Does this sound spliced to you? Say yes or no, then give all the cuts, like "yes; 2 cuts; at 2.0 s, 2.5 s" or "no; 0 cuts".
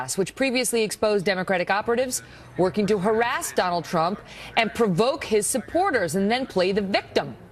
no; 0 cuts